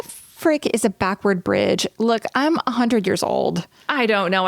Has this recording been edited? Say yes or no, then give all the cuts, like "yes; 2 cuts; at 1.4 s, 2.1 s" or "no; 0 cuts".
no; 0 cuts